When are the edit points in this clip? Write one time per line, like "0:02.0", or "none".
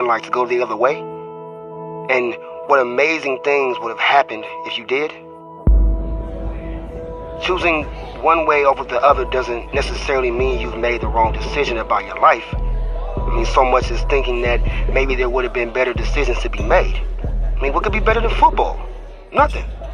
0:07.9